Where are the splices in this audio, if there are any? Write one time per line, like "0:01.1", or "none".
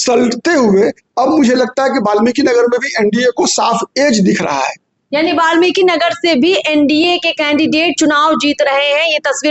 none